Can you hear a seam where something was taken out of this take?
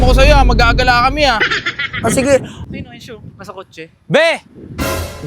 yes; 1 cut; at 2.6 s

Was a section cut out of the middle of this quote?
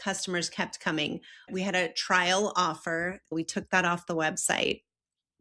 yes; 2 cuts; at 1.4 s, 3.3 s

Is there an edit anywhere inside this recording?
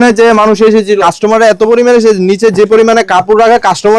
yes; 1 cut; at 1.0 s

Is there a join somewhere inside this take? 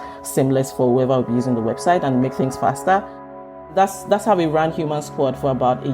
yes; 1 cut; at 3.6 s

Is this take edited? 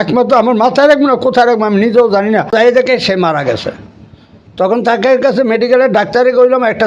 yes; 1 cut; at 2.5 s

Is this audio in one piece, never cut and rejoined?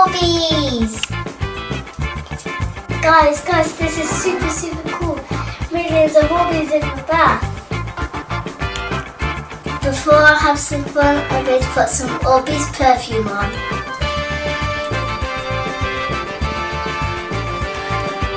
no; 1 cut; at 16.4 s

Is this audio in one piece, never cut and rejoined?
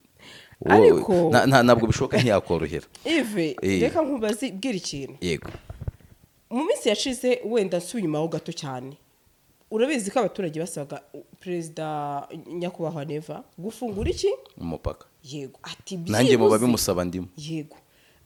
yes; 0 cuts

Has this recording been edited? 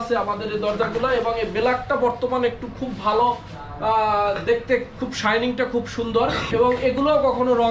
yes; 1 cut; at 6.5 s

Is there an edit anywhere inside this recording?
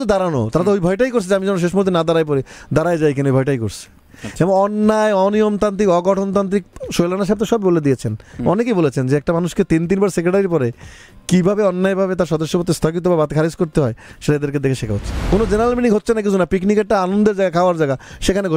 yes; 1 cut; at 15.1 s

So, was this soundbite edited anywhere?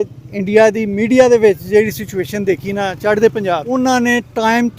yes; 1 cut; at 3.7 s

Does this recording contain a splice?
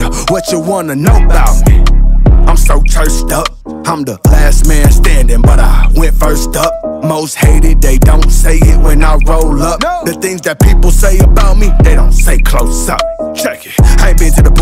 no; 0 cuts

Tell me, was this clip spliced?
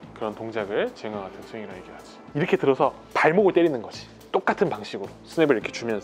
yes; 1 cut; at 2.3 s

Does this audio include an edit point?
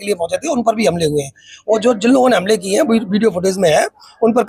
no; 0 cuts

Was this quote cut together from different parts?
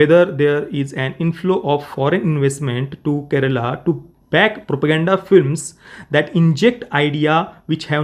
no; 0 cuts

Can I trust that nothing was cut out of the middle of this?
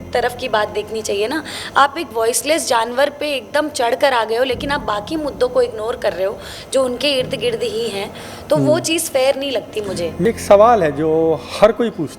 yes; 0 cuts

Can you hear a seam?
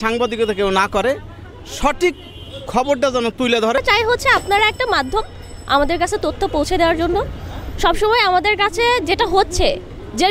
yes; 1 cut; at 3.8 s

